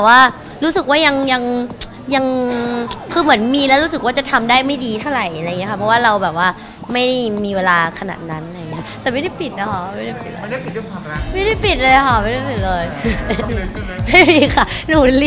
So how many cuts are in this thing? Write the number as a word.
one